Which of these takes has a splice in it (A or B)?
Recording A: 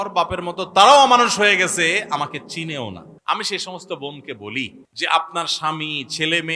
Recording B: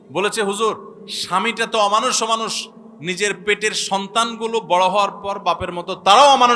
A